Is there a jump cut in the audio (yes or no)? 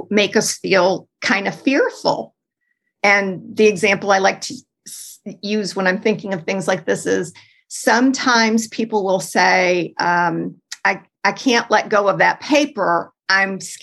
no